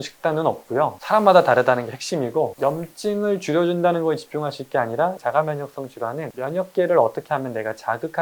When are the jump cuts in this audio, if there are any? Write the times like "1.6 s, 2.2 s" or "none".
2.5 s, 6.3 s